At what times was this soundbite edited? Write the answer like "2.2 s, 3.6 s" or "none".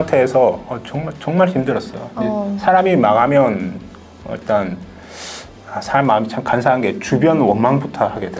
none